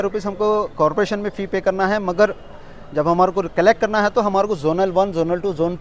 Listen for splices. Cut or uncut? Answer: uncut